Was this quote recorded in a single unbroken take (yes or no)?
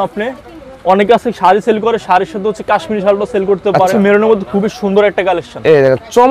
no